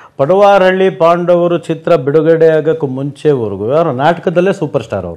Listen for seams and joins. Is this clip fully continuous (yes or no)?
yes